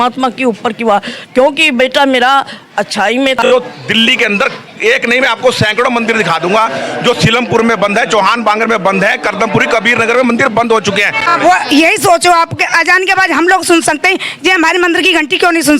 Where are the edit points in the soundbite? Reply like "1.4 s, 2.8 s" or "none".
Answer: 3.4 s, 11.3 s